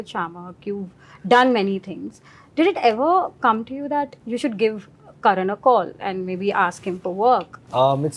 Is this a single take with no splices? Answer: yes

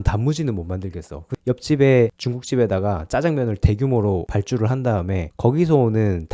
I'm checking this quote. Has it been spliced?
yes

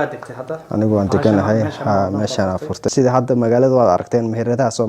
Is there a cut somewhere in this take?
yes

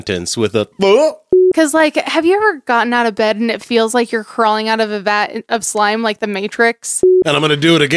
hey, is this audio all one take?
no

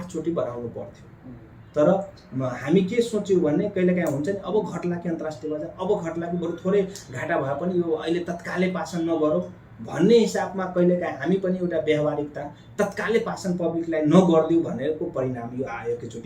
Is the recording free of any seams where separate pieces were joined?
yes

